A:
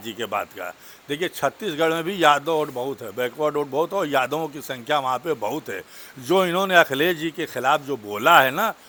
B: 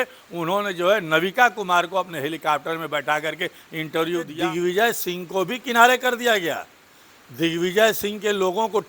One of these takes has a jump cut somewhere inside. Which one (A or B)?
B